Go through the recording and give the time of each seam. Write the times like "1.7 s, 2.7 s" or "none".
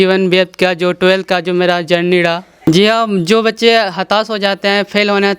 2.5 s

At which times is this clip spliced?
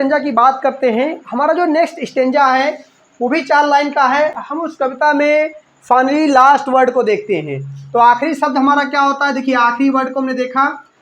4.4 s

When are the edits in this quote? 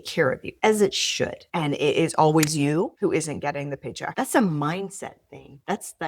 1.4 s, 4.1 s

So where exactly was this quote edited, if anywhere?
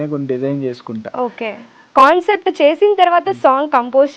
1.8 s

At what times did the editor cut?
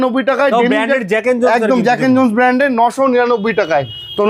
none

